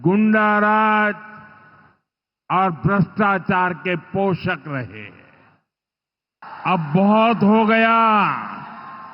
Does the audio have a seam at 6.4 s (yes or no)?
yes